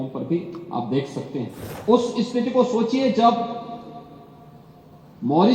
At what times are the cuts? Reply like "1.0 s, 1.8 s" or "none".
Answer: 1.7 s